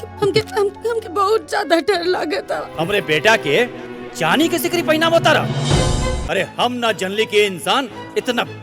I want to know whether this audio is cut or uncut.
cut